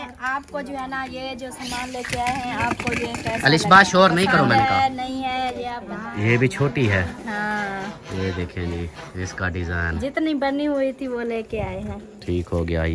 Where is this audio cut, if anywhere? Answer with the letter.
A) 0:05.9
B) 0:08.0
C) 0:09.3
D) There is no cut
A